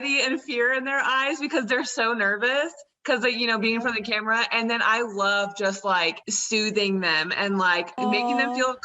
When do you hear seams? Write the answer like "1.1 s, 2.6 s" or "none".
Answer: 6.3 s, 8.0 s